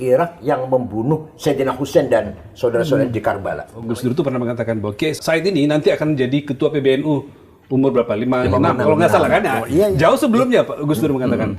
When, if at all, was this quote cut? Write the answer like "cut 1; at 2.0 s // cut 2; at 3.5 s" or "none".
cut 1; at 3.7 s // cut 2; at 5.2 s